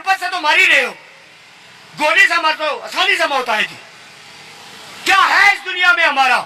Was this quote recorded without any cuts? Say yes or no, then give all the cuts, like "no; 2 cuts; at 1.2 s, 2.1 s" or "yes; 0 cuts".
yes; 0 cuts